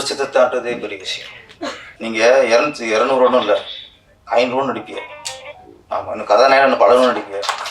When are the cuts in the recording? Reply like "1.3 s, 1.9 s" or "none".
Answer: 1.9 s